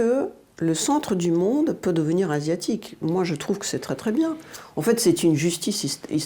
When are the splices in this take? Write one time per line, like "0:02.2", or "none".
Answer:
none